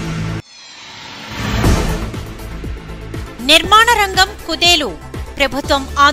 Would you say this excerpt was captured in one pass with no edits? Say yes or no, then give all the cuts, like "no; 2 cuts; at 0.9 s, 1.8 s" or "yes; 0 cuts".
yes; 0 cuts